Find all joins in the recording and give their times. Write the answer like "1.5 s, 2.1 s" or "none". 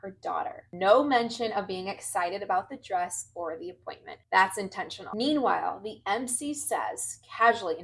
5.0 s

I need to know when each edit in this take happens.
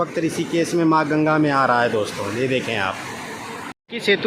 none

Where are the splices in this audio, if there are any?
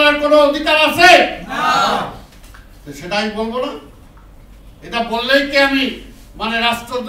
none

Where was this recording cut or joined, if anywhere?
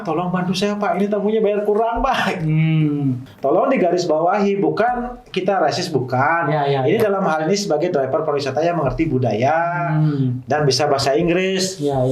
3.3 s

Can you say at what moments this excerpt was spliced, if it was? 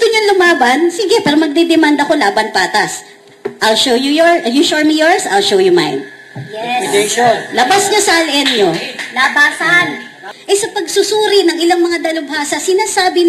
10.2 s

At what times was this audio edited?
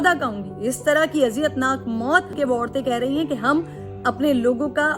2.3 s

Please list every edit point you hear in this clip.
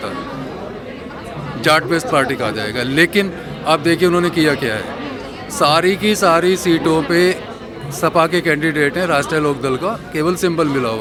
none

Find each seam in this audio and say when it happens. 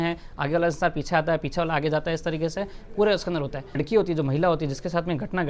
3.8 s

